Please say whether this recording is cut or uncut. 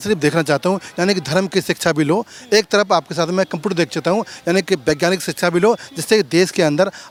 uncut